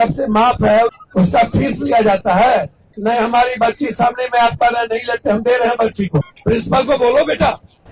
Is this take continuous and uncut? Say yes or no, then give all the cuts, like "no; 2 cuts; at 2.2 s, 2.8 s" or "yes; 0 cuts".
no; 3 cuts; at 0.9 s, 2.8 s, 6.3 s